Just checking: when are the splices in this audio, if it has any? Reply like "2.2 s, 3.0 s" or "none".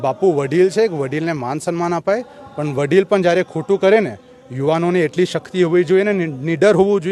none